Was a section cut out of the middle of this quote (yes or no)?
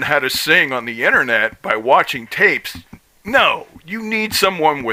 no